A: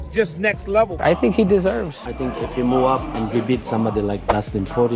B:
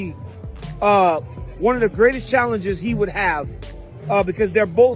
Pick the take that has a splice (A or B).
A